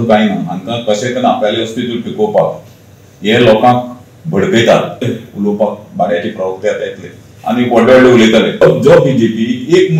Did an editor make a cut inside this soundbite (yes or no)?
yes